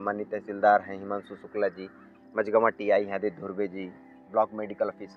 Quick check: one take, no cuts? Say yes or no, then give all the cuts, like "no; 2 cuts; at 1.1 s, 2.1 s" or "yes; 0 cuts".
yes; 0 cuts